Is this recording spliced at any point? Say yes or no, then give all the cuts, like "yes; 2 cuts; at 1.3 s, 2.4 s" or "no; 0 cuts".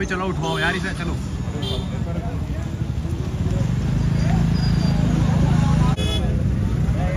no; 0 cuts